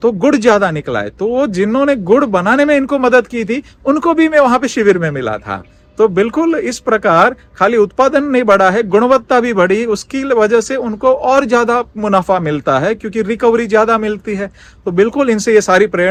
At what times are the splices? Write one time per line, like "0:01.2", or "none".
none